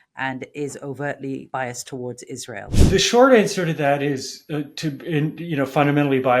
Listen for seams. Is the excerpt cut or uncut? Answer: cut